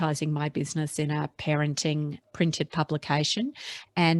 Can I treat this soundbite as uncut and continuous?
no; 1 cut; at 2.2 s

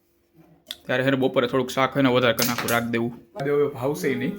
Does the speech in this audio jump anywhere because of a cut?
yes; 1 cut; at 3.4 s

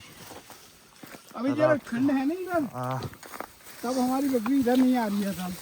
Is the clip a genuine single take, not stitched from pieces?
yes; 0 cuts

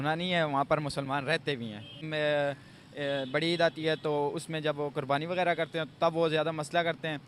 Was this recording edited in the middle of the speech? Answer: yes; 1 cut; at 2.0 s

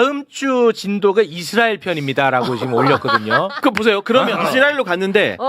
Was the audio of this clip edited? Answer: yes; 1 cut; at 4.4 s

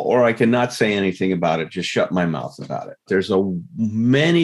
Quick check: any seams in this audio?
yes; 1 cut; at 3.0 s

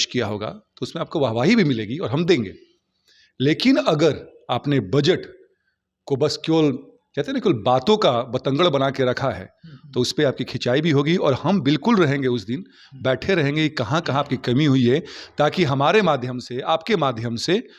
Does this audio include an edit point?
no; 0 cuts

